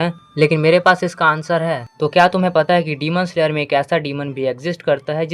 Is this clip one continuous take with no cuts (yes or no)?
no